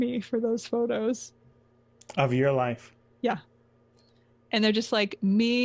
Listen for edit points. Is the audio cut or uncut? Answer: uncut